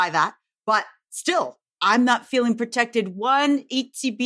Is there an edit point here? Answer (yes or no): no